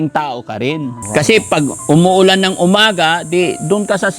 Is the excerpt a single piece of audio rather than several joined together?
no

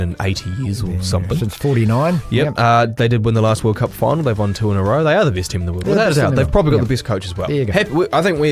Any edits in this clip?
no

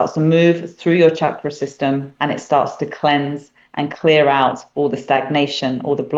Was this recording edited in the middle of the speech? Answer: no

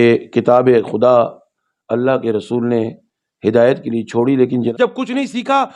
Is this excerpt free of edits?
no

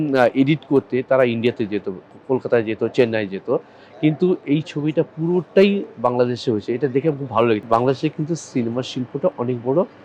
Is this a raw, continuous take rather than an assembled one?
no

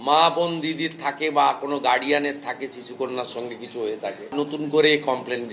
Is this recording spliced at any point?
yes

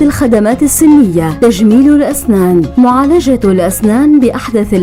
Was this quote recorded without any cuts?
yes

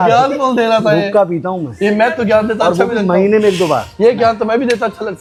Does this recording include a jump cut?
no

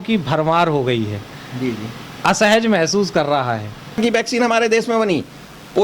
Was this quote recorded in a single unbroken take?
no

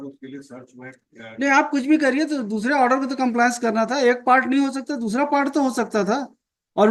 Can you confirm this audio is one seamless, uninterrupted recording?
yes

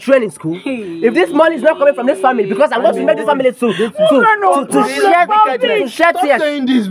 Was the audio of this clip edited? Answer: no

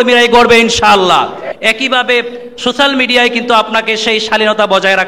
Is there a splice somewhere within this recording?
yes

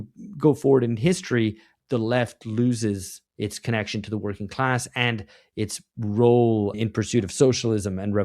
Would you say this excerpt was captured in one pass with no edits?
no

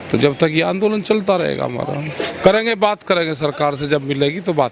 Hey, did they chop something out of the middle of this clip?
yes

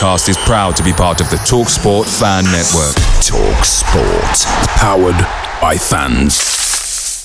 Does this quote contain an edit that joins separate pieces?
no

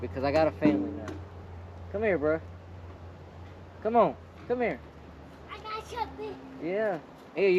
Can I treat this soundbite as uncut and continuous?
yes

